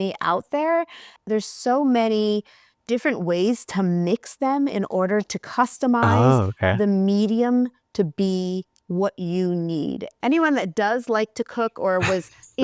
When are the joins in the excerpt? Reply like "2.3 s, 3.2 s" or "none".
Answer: 1.1 s, 10.1 s

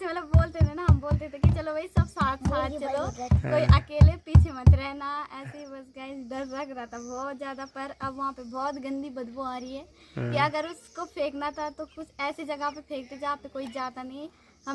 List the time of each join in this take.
none

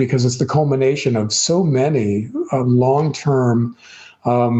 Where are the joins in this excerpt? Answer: none

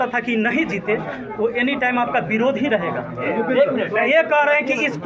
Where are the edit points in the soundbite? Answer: 3.3 s

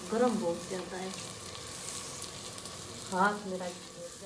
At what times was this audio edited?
none

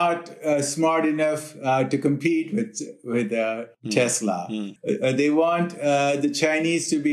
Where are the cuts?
none

